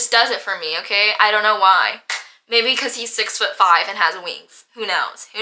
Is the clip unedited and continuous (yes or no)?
yes